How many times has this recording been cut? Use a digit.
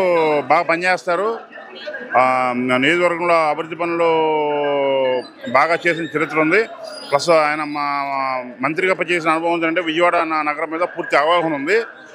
0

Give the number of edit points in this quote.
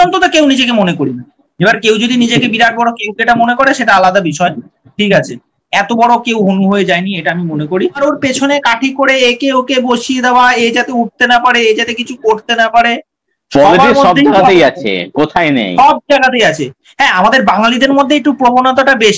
1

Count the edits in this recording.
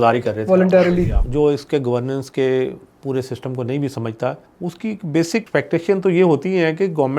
3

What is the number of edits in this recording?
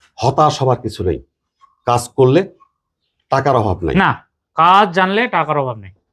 0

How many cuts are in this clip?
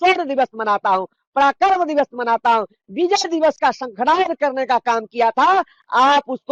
0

